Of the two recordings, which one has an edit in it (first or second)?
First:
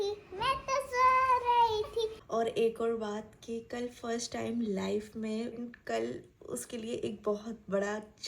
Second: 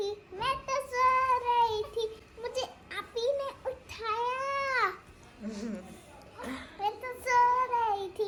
first